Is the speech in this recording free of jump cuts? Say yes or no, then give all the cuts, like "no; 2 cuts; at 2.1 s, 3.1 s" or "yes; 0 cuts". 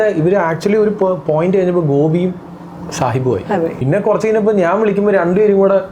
no; 1 cut; at 3.8 s